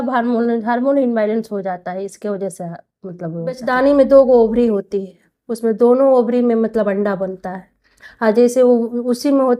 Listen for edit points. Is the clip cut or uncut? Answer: cut